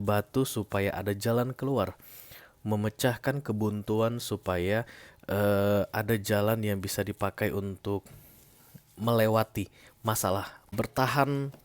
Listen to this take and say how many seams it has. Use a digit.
1